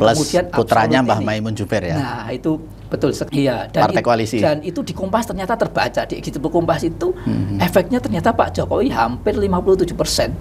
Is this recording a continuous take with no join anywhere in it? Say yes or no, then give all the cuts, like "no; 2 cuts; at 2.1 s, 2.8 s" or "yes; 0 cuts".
no; 1 cut; at 3.2 s